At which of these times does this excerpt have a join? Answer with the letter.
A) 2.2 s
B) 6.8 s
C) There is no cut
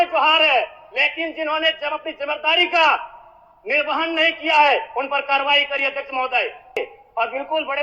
B